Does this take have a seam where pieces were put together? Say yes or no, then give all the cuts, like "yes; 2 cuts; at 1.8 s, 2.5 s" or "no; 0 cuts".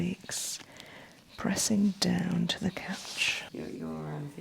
yes; 1 cut; at 3.4 s